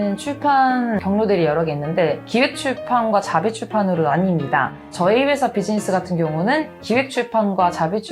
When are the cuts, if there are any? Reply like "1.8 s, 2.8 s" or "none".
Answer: 1.0 s, 4.8 s

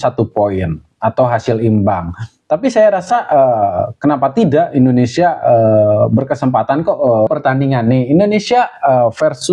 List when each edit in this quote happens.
7.3 s

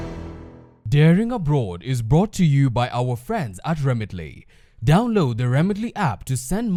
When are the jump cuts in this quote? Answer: none

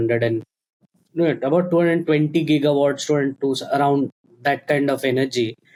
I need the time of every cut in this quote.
none

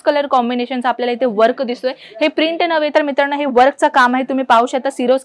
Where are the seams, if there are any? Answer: none

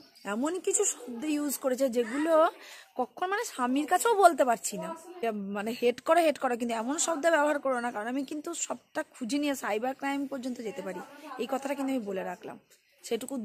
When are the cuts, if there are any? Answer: 5.2 s

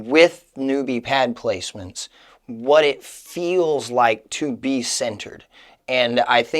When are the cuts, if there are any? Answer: none

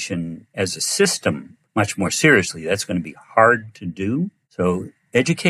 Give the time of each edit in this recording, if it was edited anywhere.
1.5 s, 4.4 s

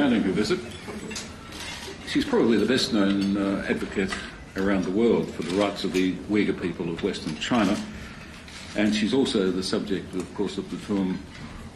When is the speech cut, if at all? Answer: 4.4 s

